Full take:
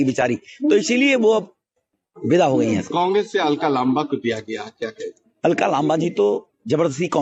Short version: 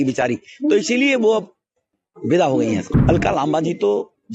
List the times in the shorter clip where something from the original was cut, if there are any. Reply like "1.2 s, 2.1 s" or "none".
2.9 s